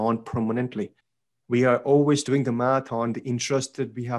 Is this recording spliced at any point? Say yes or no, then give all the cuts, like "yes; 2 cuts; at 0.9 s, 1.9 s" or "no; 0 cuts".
yes; 1 cut; at 1.0 s